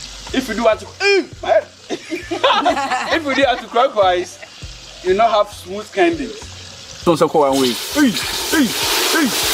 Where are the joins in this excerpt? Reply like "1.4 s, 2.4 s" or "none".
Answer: 7.0 s